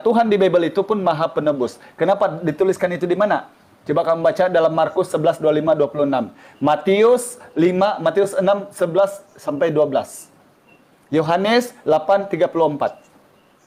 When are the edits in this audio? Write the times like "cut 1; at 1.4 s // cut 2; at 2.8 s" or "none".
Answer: none